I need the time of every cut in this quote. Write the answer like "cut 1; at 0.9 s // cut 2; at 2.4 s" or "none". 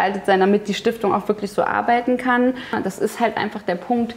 cut 1; at 2.8 s